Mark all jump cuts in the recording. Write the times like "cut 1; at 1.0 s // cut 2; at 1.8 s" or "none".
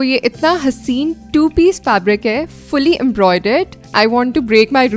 none